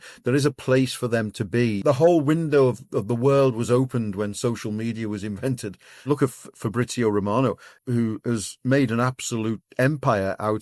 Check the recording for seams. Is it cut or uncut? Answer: cut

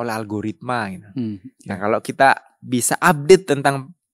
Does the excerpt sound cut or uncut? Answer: uncut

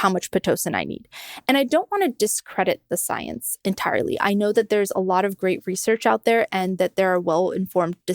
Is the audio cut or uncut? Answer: cut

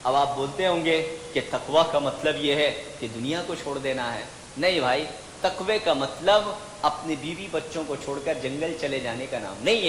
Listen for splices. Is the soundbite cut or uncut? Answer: uncut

